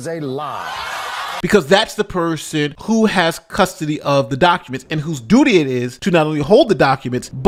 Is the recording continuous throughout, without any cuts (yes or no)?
yes